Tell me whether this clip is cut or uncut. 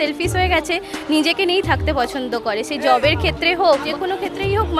uncut